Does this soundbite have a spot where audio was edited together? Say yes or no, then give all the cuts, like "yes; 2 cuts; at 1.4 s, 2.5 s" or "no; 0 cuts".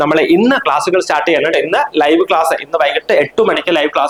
no; 0 cuts